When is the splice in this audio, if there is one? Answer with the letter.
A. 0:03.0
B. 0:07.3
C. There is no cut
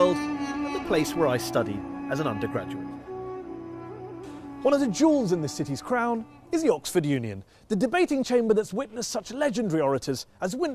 B